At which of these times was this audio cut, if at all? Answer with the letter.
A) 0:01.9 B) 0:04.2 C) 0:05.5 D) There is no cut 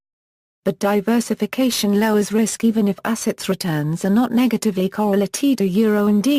A